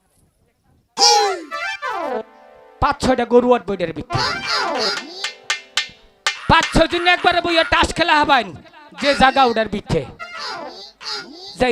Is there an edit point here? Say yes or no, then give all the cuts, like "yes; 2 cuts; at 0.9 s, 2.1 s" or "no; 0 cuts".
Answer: no; 0 cuts